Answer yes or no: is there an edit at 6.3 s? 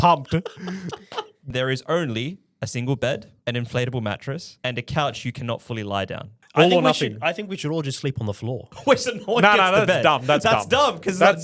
yes